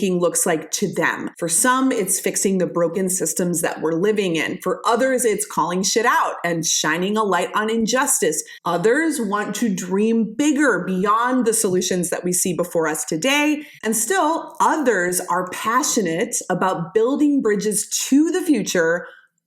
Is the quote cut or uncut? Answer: cut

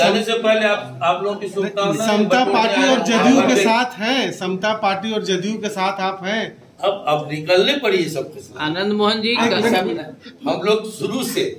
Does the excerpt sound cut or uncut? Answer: cut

